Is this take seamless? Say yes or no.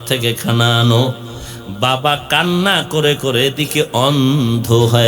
yes